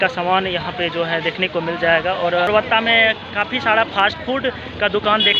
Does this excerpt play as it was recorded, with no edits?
no; 1 cut; at 2.5 s

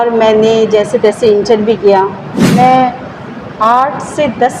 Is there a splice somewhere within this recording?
yes; 1 cut; at 2.5 s

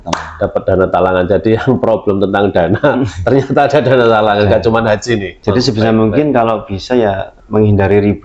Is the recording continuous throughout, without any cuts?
no; 2 cuts; at 5.3 s, 7.3 s

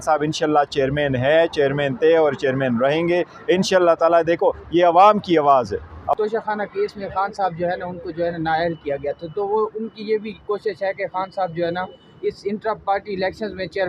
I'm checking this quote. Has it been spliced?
yes; 1 cut; at 6.1 s

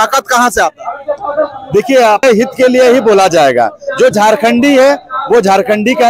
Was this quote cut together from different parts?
yes; 1 cut; at 2.2 s

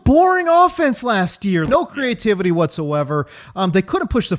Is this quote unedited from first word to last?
yes; 0 cuts

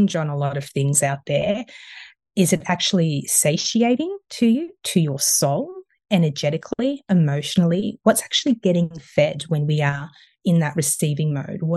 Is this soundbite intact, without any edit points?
yes; 0 cuts

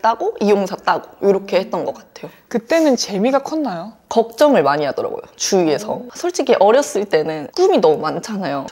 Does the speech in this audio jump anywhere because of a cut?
no; 0 cuts

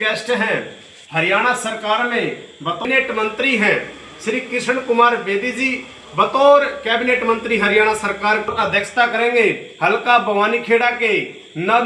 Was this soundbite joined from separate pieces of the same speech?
yes; 2 cuts; at 2.8 s, 8.5 s

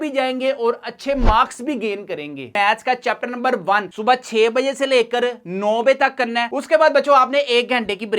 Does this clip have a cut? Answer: yes; 1 cut; at 2.5 s

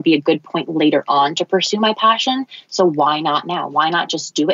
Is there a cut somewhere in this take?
no; 0 cuts

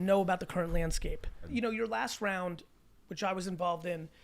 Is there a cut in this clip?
yes; 1 cut; at 1.5 s

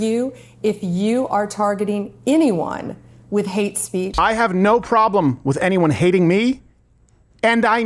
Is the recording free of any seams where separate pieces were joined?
no; 1 cut; at 4.1 s

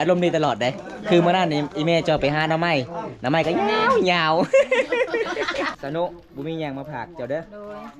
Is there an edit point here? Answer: yes; 1 cut; at 5.7 s

